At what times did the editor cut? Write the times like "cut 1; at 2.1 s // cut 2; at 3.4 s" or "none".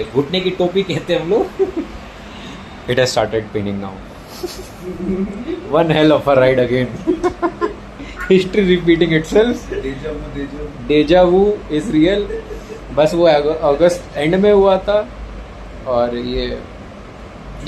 none